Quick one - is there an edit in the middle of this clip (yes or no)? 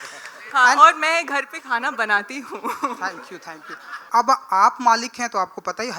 yes